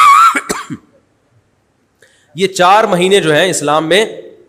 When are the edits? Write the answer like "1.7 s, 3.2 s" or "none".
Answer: none

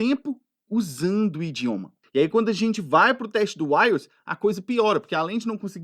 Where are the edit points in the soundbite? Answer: 2.0 s

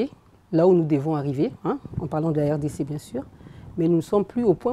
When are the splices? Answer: none

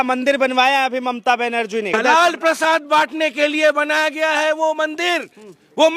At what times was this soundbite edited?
1.9 s

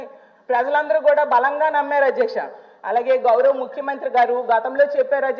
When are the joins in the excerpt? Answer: none

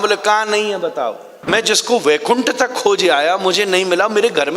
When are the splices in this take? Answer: 1.5 s

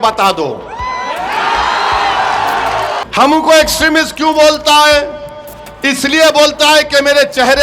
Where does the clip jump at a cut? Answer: 3.0 s

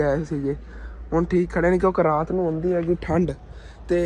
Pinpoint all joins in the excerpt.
none

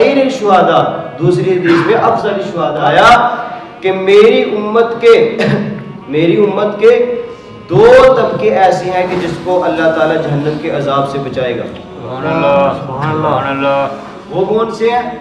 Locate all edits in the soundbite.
2.7 s

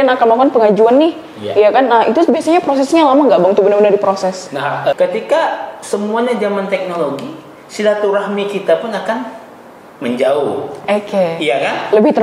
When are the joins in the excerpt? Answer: 4.9 s

